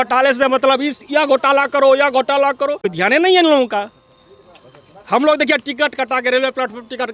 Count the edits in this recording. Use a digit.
1